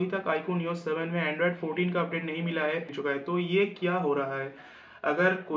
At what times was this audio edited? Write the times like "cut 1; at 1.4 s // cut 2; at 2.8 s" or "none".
cut 1; at 2.9 s